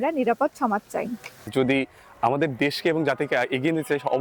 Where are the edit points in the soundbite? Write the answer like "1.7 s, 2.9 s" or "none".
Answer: 1.3 s